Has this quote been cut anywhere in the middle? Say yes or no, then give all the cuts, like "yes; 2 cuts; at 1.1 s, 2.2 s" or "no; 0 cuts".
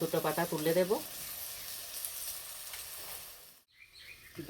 yes; 1 cut; at 3.6 s